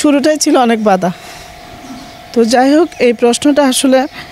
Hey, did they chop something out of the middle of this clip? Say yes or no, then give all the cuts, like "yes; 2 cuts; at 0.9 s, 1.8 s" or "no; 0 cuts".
no; 0 cuts